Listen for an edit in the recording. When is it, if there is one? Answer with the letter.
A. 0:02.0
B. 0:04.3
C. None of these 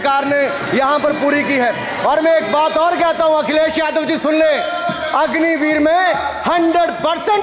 C